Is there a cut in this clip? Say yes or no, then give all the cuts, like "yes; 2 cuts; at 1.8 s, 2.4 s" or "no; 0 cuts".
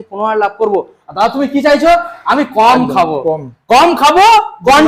no; 0 cuts